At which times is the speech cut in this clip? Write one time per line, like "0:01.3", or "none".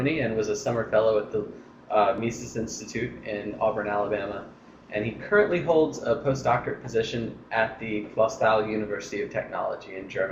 0:09.4